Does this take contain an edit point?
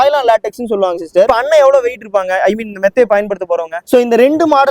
yes; 2 cuts; at 1.3 s, 3.8 s

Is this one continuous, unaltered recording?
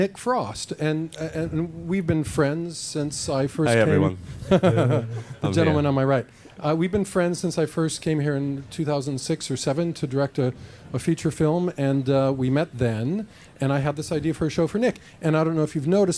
no; 1 cut; at 11.3 s

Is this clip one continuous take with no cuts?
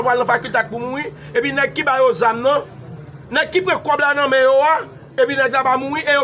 yes; 0 cuts

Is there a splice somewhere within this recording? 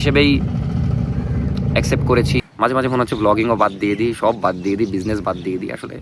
yes; 1 cut; at 2.5 s

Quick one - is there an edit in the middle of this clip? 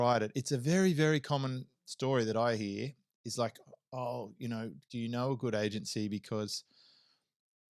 yes; 1 cut; at 4.8 s

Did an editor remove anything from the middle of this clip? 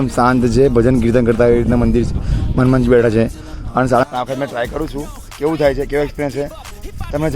yes; 1 cut; at 4.0 s

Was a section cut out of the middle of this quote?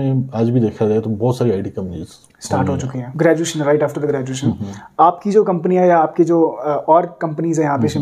yes; 1 cut; at 3.3 s

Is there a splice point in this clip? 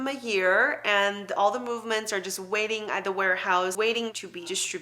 yes; 1 cut; at 3.7 s

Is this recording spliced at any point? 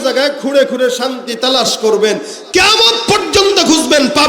no; 0 cuts

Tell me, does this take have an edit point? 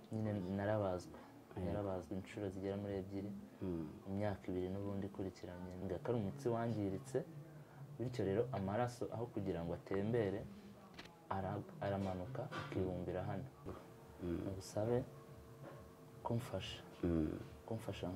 yes; 2 cuts; at 5.8 s, 13.8 s

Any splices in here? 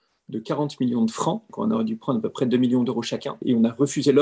yes; 2 cuts; at 1.5 s, 3.3 s

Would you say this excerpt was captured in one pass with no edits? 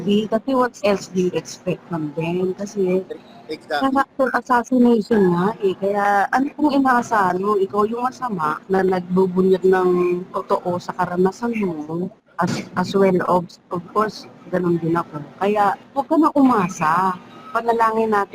no; 3 cuts; at 8.6 s, 12.2 s, 15.8 s

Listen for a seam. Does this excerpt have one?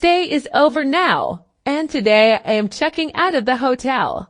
yes; 1 cut; at 1.5 s

